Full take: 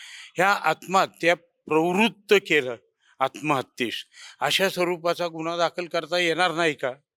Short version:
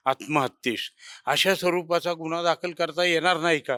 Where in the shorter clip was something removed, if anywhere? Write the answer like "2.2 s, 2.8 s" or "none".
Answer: none